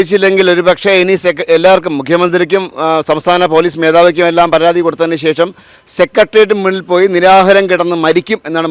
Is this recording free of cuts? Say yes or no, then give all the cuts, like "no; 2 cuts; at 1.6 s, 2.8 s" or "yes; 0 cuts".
yes; 0 cuts